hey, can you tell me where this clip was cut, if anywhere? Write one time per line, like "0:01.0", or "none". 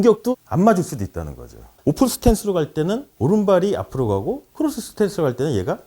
0:01.8